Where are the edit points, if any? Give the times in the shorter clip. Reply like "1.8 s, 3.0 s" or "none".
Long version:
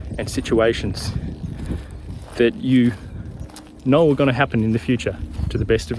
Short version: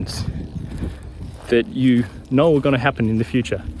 2.2 s